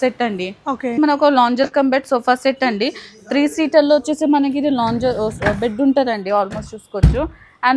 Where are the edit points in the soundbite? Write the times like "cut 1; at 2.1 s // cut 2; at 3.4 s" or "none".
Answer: cut 1; at 1.0 s